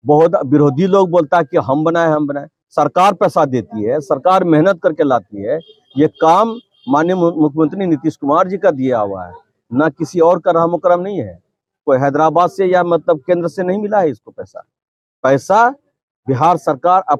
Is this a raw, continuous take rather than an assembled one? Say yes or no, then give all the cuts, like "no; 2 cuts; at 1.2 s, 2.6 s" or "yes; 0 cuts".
yes; 0 cuts